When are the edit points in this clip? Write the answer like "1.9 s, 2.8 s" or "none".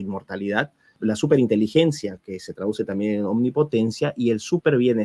1.0 s